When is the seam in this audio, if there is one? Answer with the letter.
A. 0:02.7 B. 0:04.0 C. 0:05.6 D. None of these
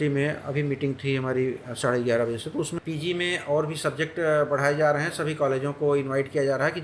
A